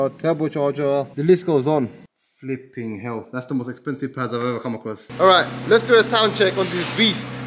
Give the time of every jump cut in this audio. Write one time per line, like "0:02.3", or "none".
0:01.1
0:02.1
0:05.0

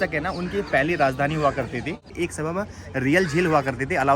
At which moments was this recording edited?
0:02.1

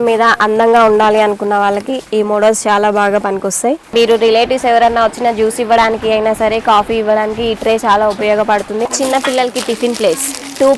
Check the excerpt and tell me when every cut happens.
0:03.8
0:08.9

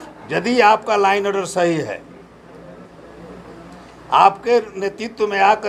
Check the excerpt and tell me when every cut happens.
none

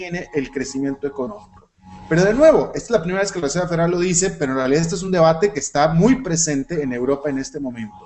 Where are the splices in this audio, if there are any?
0:03.1

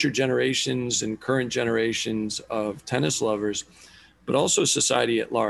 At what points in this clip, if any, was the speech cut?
none

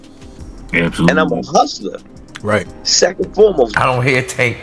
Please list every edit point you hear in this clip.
0:03.7

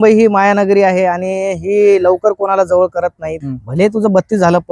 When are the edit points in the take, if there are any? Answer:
0:03.5

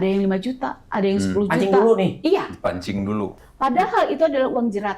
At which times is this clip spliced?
0:03.4

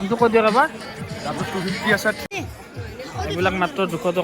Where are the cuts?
0:02.2

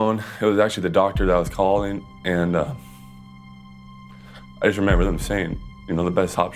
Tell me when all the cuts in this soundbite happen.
none

